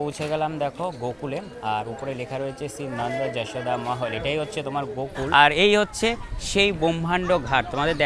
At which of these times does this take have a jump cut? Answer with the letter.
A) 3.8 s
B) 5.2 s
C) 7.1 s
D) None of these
B